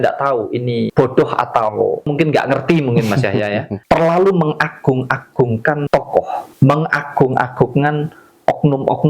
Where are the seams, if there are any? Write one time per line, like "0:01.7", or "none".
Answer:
0:00.9
0:02.1
0:03.7
0:06.0